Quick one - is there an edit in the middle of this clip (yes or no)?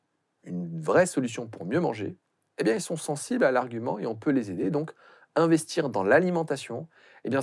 no